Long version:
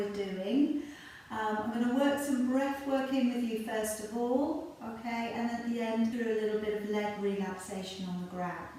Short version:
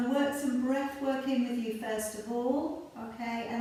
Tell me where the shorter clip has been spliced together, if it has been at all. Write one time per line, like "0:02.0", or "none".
none